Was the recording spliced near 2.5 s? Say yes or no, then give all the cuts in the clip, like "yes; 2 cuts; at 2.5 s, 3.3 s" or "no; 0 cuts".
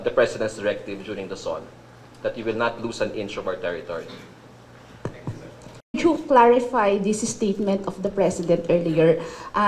no; 1 cut; at 6.0 s